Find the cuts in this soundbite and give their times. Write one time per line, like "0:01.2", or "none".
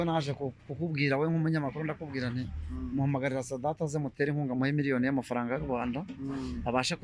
none